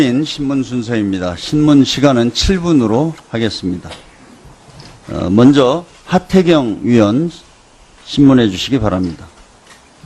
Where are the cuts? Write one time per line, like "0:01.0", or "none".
none